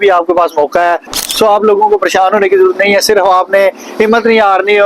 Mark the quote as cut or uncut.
cut